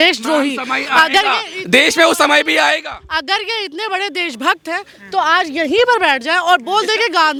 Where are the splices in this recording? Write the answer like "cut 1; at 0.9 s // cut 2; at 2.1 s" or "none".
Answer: none